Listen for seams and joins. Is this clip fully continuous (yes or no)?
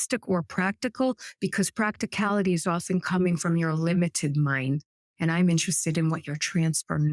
yes